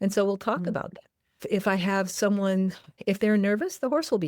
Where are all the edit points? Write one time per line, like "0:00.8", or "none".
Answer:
0:02.9